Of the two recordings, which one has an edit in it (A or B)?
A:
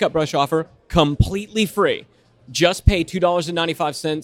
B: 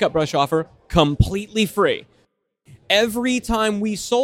B